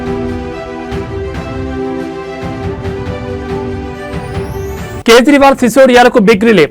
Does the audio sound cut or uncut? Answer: cut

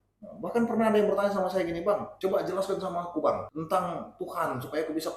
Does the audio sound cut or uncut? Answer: cut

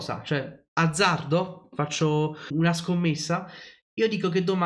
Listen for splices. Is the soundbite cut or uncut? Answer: cut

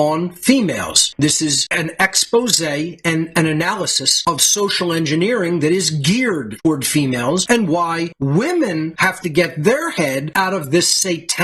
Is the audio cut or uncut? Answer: uncut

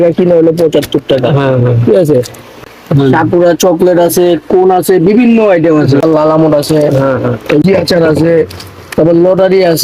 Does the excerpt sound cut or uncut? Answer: cut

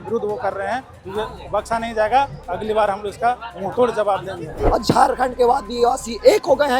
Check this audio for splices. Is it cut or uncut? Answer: cut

